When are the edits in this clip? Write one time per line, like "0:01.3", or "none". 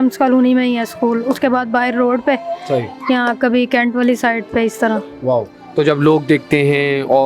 none